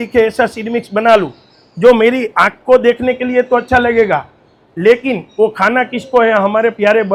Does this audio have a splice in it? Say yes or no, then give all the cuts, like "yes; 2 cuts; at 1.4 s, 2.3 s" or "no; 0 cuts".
no; 0 cuts